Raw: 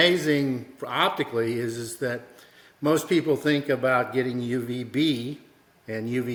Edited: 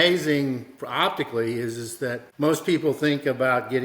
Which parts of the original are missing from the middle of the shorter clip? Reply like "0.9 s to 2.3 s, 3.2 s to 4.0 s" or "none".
2.2 s to 2.7 s